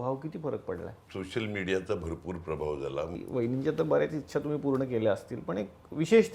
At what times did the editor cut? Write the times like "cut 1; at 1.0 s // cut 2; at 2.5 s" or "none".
cut 1; at 1.0 s // cut 2; at 3.2 s